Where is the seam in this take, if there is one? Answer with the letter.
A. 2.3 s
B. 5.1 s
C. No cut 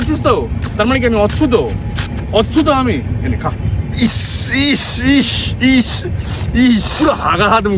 C